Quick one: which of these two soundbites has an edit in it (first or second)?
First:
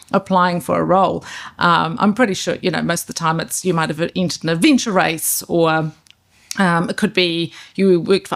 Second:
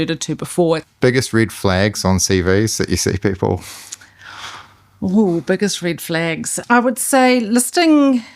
second